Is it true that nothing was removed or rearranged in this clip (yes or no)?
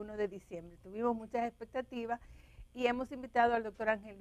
no